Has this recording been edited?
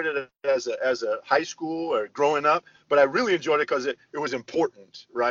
no; 0 cuts

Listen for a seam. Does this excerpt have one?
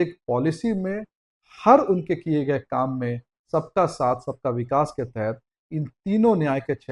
no; 0 cuts

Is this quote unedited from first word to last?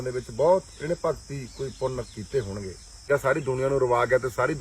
no; 1 cut; at 3.0 s

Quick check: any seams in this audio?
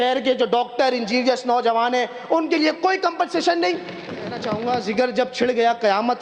yes; 1 cut; at 4.5 s

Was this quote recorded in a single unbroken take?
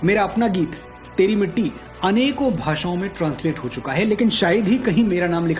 yes; 0 cuts

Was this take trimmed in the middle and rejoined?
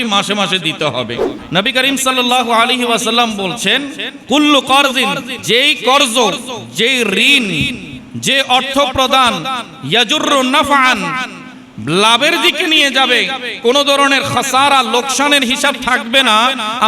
yes; 3 cuts; at 1.4 s, 4.1 s, 5.3 s

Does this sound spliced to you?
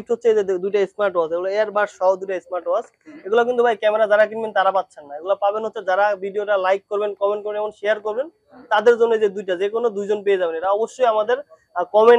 no; 0 cuts

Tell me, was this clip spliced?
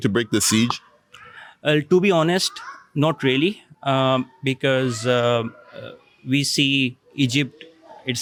no; 0 cuts

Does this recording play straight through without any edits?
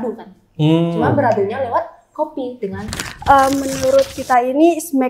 no; 1 cut; at 3.0 s

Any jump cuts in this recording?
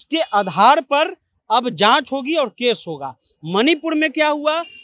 no; 0 cuts

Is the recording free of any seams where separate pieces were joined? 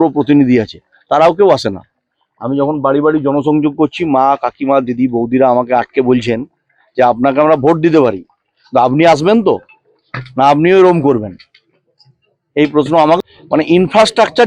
no; 1 cut; at 13.2 s

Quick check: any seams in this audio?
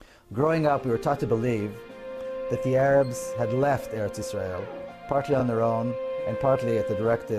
no; 0 cuts

